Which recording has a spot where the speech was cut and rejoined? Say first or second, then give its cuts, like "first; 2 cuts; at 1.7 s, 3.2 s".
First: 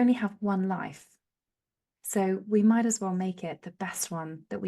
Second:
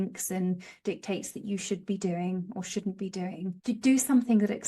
second; 1 cut; at 3.6 s